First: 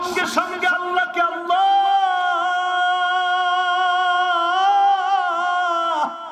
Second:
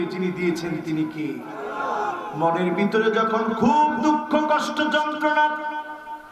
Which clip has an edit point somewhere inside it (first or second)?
second